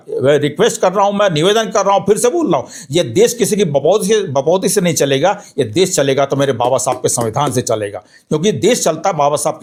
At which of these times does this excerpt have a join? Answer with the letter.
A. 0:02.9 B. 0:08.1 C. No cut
C